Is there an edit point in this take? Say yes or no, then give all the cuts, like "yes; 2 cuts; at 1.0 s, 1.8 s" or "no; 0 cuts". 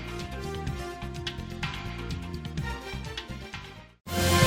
no; 0 cuts